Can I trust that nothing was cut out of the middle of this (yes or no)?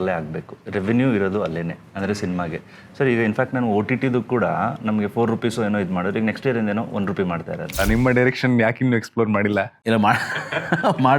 no